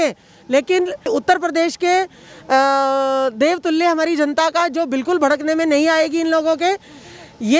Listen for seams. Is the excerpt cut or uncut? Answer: cut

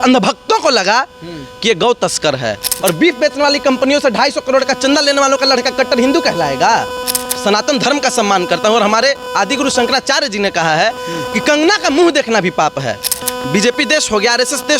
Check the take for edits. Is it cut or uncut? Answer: cut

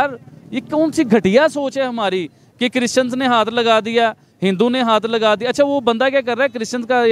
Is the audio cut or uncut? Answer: uncut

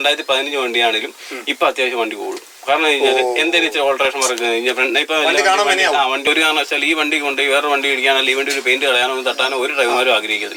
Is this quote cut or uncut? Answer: cut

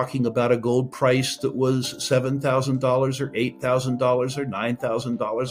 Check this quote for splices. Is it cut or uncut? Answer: uncut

